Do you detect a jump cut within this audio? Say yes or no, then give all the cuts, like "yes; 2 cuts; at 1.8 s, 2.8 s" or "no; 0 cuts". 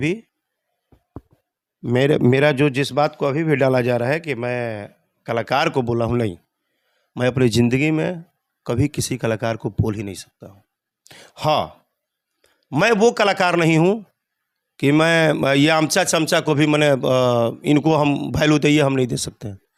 no; 0 cuts